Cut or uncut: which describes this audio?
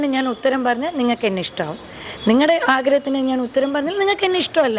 uncut